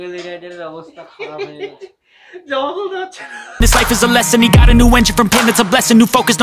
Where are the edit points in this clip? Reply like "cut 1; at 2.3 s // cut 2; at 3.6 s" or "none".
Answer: cut 1; at 3.6 s